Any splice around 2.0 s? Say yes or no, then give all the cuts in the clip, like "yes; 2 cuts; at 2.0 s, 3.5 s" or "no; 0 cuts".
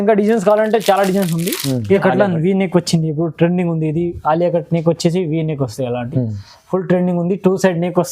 yes; 1 cut; at 2.0 s